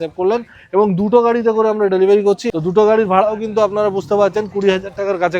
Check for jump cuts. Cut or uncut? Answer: cut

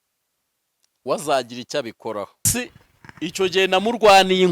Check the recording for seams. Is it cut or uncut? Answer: cut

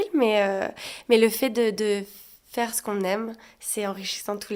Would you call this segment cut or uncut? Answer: uncut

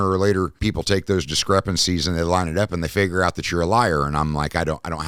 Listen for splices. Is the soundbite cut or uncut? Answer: uncut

